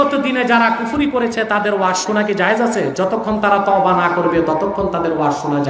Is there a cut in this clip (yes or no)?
no